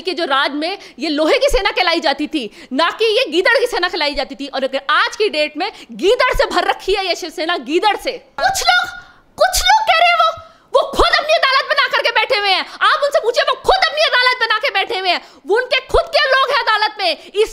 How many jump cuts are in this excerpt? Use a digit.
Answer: 1